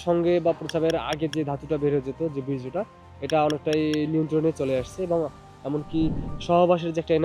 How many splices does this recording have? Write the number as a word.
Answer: one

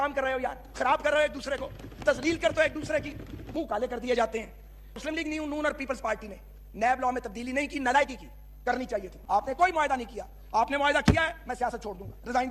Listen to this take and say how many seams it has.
three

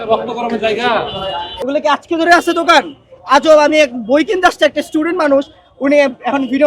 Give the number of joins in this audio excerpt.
one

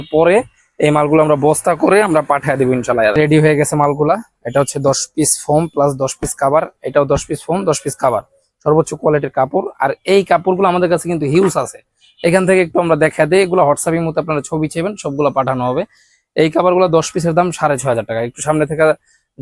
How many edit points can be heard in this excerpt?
zero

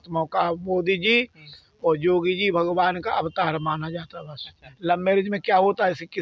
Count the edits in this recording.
one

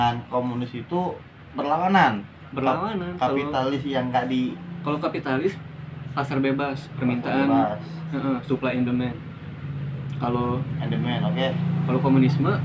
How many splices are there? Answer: zero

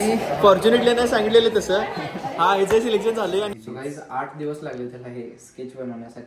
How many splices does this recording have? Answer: one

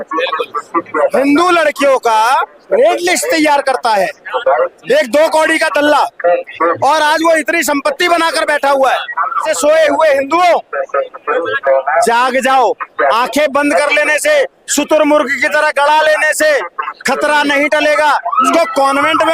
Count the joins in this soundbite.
two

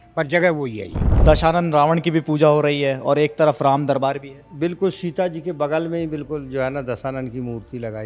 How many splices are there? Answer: one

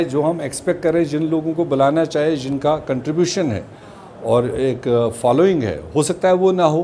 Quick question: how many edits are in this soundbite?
zero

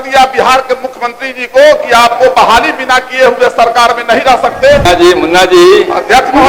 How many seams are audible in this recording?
one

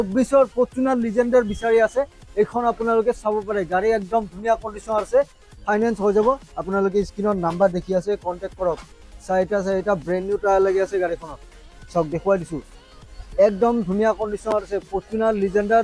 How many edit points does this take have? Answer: zero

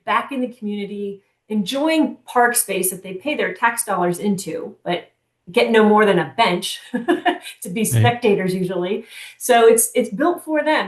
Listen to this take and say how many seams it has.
zero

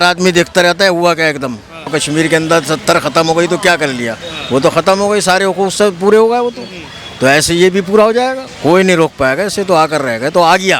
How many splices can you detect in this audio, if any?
two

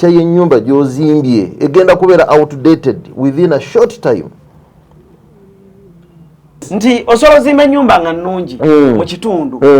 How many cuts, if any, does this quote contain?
one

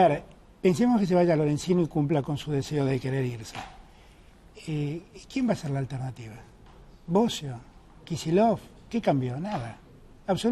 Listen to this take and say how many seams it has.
zero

